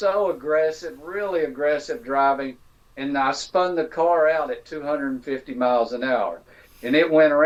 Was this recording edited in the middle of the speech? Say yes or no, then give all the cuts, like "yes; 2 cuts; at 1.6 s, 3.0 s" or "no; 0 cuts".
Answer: no; 0 cuts